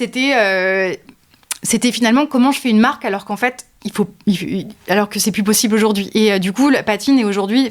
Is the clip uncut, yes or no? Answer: yes